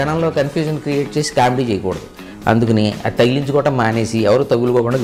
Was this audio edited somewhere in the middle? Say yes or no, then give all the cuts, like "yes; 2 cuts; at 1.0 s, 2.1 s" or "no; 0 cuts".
no; 0 cuts